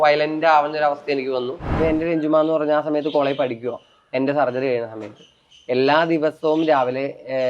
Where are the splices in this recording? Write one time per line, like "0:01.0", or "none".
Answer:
0:01.7